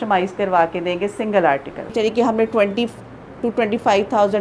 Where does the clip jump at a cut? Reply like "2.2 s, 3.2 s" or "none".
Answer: 1.9 s